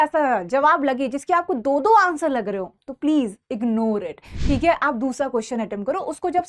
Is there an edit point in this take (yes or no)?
no